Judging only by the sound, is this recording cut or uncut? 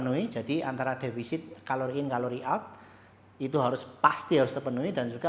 uncut